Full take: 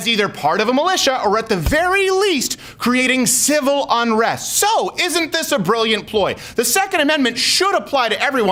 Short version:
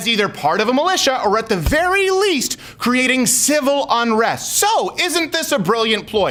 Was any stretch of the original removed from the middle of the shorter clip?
no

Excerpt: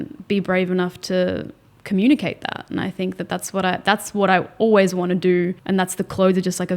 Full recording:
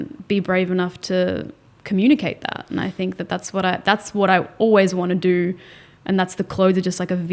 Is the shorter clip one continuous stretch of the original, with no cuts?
no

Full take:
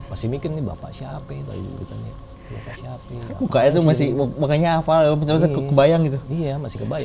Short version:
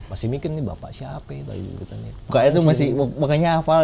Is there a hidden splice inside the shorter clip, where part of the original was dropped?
yes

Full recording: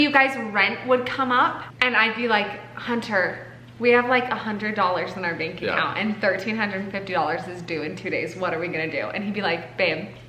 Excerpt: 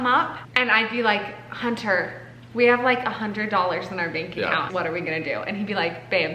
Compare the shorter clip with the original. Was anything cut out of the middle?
yes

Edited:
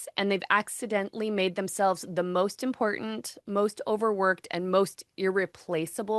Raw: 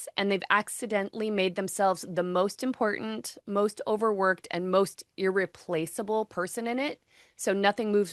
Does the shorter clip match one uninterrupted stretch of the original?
yes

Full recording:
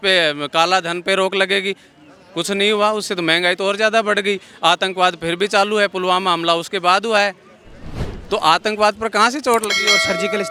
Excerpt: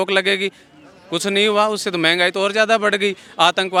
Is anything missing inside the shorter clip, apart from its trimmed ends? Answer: no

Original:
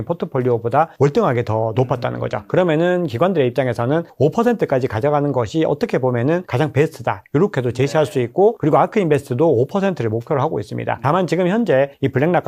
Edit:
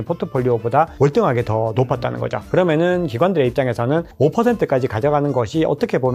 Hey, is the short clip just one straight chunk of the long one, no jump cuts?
yes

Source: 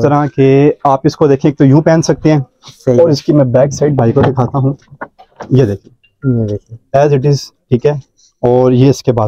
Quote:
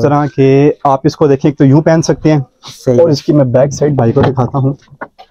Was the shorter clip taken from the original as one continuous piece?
yes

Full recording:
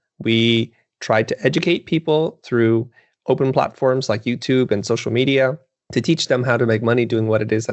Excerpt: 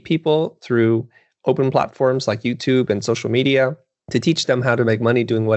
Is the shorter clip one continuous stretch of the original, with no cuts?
yes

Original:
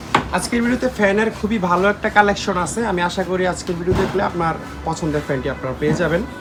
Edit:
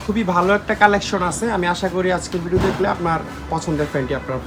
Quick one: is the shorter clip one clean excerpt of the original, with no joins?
yes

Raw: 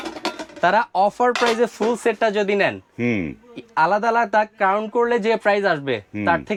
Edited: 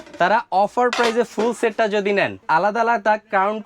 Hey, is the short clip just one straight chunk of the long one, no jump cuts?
no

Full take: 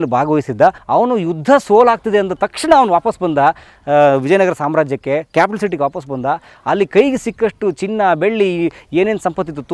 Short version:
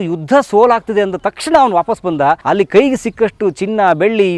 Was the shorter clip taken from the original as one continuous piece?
no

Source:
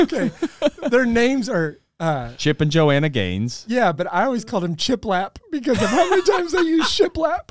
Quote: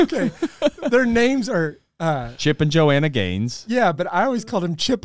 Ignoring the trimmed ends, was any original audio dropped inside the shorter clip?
no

